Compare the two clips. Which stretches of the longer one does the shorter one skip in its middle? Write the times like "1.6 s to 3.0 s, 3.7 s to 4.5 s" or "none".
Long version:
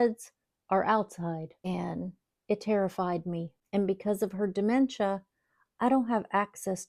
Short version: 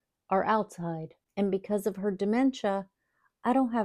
1.6 s to 3.5 s